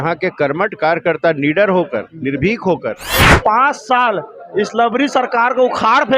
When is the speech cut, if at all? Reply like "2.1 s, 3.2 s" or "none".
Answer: 3.4 s